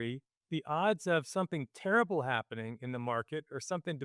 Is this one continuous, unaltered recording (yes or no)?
yes